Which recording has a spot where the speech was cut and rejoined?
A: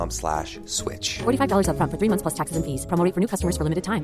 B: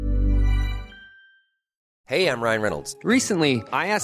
B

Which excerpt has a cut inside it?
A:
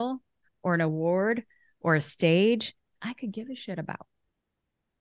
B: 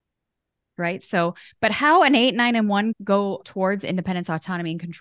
B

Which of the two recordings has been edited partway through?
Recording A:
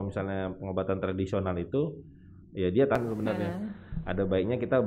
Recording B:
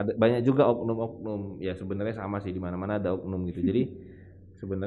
A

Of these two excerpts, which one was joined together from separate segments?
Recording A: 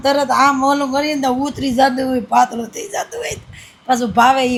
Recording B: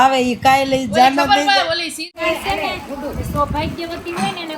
B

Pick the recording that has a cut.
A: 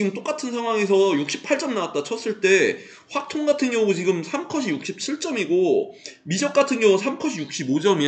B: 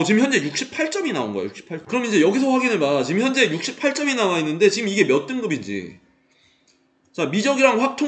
B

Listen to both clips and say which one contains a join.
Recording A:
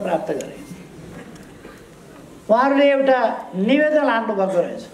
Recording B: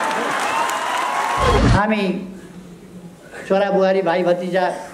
B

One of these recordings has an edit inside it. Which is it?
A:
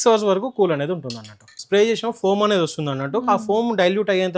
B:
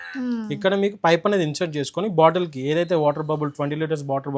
A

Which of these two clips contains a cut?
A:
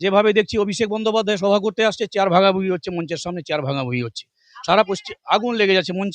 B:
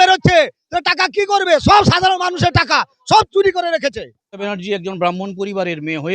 B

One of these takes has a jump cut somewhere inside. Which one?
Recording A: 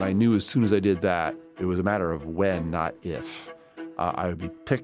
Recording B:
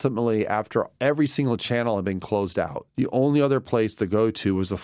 A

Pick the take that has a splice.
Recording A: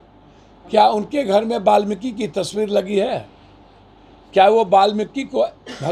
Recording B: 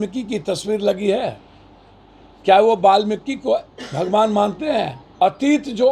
B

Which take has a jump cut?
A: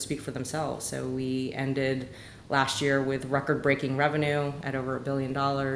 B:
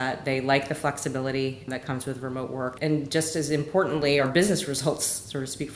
B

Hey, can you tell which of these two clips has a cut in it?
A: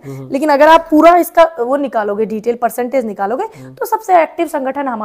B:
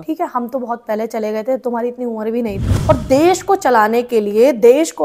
B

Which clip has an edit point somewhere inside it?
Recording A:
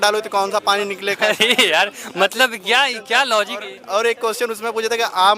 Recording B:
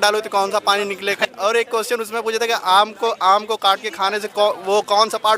B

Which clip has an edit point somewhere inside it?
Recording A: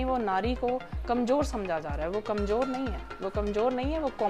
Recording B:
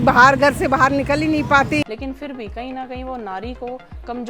B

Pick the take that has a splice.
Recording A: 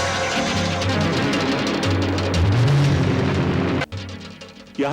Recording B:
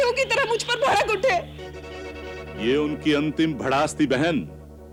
A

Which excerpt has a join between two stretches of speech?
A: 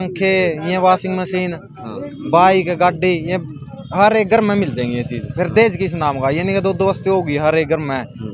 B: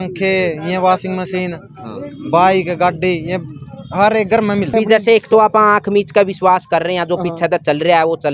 B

